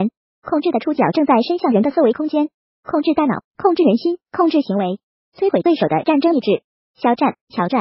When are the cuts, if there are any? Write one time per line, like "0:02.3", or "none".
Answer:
none